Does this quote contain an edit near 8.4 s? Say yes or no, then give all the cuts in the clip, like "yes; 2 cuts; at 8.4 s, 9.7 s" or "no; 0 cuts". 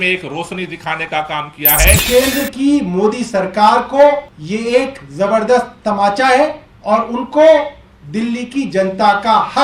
no; 3 cuts; at 2.0 s, 4.3 s, 6.7 s